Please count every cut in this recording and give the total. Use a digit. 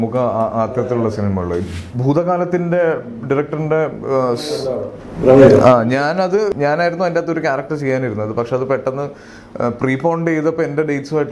2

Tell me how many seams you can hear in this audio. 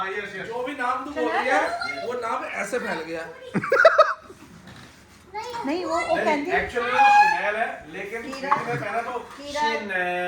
0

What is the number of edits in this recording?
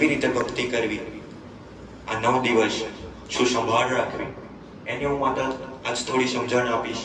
0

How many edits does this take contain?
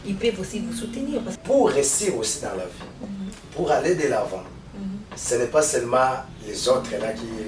1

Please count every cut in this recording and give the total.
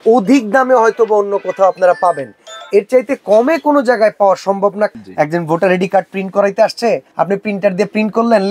2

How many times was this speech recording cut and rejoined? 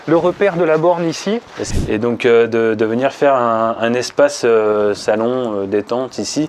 1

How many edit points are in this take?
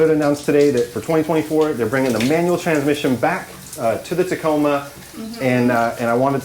0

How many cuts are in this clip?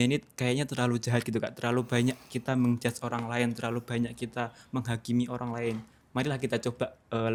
0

